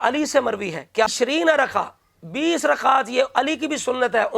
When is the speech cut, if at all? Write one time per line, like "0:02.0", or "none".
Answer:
0:01.1